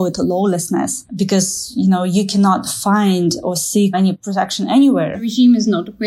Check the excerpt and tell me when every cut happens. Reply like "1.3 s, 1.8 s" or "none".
1.0 s, 4.1 s, 5.3 s